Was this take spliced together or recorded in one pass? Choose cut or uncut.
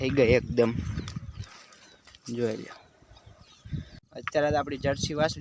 cut